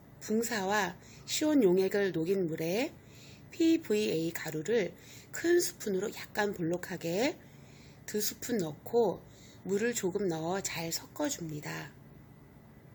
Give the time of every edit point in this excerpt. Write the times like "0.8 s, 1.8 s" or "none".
none